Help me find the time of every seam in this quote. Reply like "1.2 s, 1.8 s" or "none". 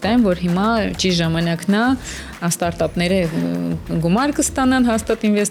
none